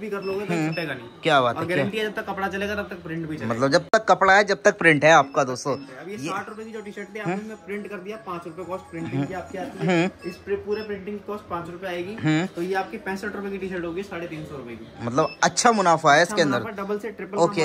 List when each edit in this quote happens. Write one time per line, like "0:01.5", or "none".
none